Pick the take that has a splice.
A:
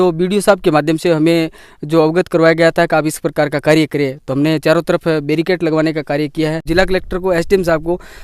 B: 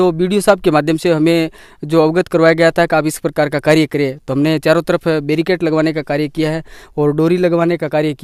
A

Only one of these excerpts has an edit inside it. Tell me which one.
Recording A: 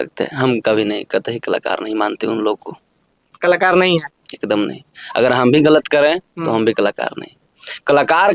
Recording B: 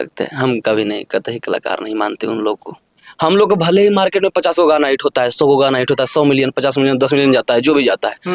B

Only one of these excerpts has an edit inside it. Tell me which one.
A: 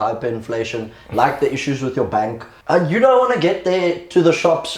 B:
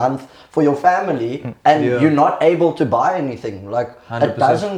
A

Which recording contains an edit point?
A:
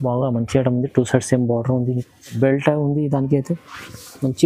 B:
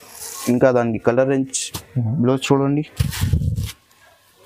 A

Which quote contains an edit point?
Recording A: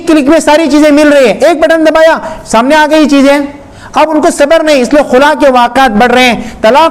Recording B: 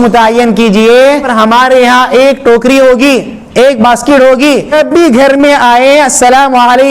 B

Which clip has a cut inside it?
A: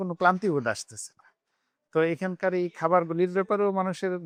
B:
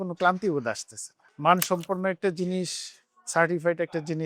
B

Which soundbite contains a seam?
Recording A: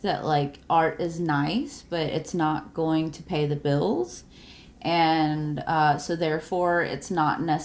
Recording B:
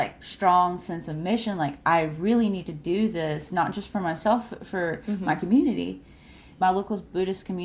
B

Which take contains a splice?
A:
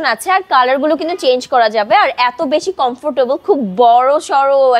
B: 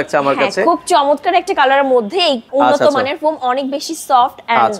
B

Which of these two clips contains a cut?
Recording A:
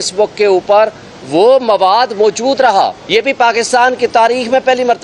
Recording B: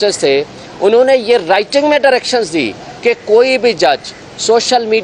A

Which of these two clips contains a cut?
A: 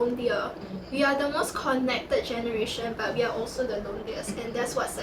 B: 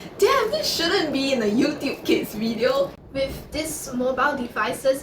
B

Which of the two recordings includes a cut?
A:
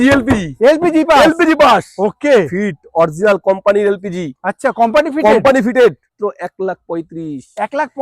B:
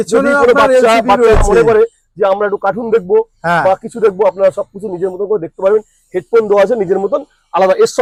A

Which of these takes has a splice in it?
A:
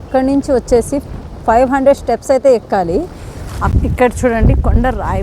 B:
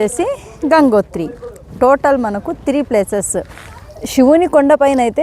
A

